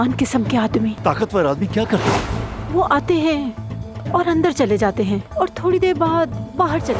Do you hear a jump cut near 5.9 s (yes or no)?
no